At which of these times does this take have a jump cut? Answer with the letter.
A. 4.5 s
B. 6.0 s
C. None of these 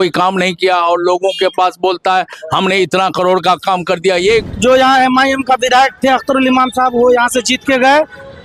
A